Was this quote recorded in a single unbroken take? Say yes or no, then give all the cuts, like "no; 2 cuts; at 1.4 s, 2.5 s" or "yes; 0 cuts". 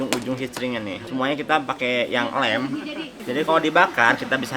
no; 1 cut; at 1.0 s